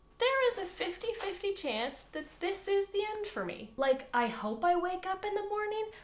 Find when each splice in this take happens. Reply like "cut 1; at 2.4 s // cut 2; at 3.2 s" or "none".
cut 1; at 3.6 s